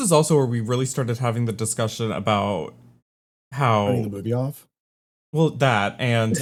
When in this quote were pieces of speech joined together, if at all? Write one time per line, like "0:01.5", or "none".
none